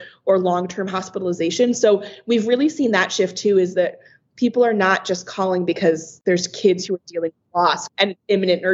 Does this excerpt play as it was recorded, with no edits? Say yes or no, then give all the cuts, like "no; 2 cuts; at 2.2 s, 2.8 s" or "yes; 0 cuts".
no; 2 cuts; at 6.1 s, 7.9 s